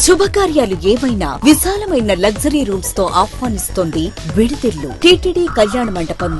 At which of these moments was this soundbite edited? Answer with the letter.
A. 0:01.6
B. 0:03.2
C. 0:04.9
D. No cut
C